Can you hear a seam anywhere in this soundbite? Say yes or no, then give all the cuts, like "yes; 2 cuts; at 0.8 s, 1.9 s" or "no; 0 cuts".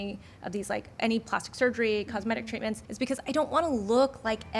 yes; 1 cut; at 2.8 s